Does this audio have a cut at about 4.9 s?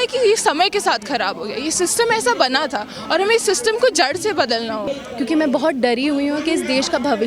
yes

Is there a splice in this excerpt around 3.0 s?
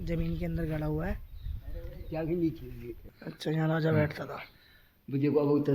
yes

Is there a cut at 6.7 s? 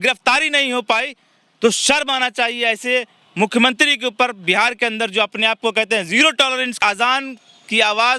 yes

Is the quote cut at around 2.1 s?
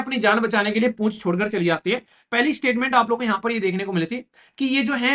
yes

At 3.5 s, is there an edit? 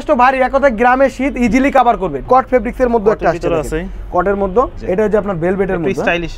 no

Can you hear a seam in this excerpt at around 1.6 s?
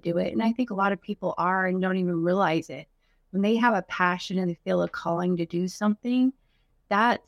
no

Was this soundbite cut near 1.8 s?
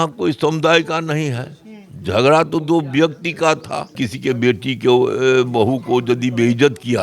no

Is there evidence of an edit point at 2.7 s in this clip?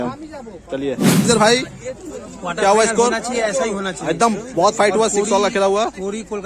no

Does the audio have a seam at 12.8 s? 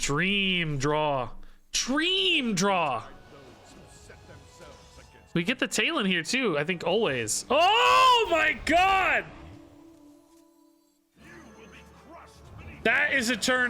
yes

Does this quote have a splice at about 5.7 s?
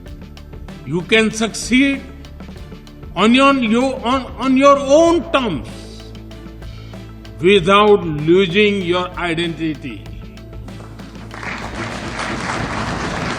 yes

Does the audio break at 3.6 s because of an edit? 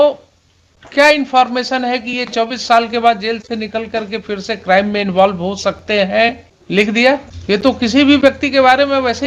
no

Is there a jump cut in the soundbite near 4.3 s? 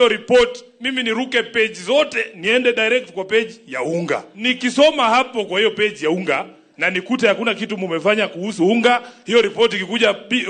yes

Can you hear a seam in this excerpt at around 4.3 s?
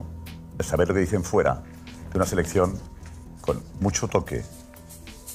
no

